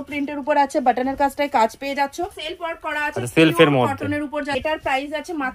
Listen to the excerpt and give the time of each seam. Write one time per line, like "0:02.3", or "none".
0:02.4
0:04.5